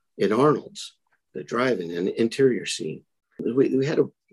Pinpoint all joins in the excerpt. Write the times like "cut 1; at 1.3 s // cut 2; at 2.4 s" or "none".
cut 1; at 3.4 s